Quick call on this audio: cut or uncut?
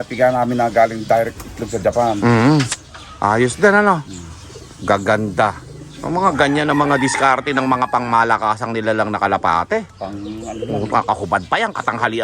uncut